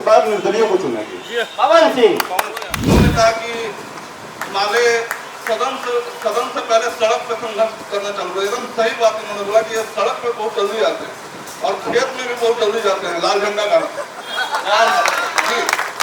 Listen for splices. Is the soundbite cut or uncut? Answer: cut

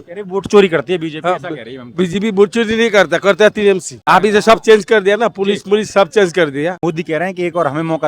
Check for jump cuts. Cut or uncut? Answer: cut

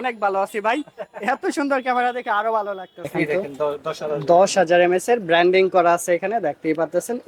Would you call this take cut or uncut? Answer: cut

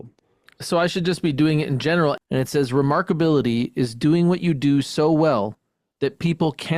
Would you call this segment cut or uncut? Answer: cut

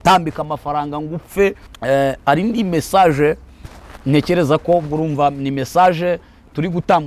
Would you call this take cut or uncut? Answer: cut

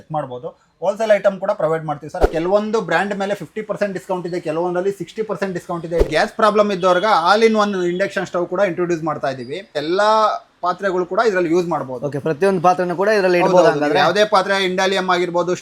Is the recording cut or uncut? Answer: cut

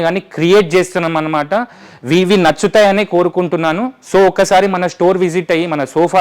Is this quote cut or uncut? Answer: uncut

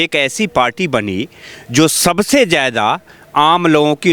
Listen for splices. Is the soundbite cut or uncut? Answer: uncut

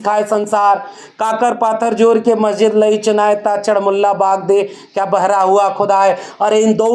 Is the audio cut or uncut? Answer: uncut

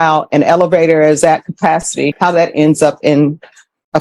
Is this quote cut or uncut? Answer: cut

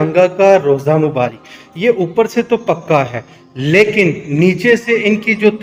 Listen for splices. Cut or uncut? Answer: uncut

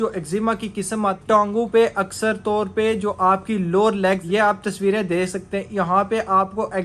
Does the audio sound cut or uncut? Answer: cut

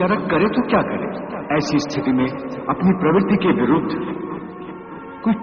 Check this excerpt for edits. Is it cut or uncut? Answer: cut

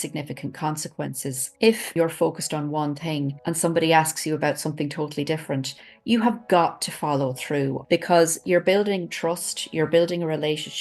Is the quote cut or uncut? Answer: cut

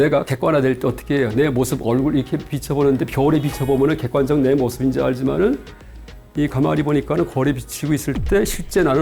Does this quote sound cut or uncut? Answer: uncut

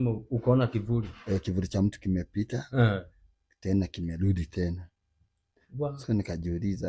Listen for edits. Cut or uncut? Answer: uncut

